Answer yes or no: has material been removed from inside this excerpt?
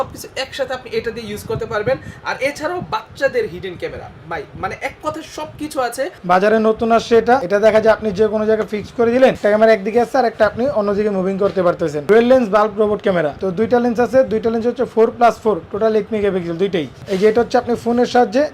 yes